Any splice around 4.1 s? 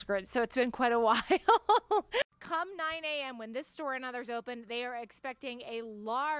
no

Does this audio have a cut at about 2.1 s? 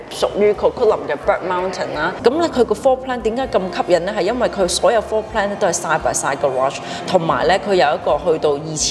yes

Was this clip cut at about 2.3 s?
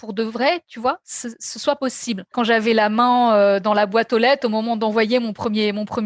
yes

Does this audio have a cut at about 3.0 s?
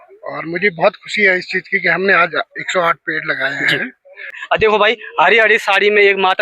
no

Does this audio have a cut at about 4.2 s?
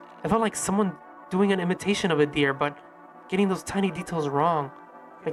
no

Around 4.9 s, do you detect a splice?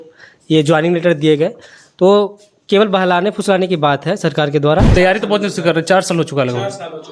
yes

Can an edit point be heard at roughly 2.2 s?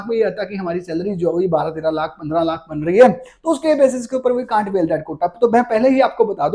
no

